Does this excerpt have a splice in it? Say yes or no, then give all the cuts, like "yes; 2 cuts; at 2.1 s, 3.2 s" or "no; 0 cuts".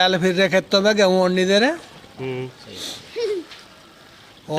no; 0 cuts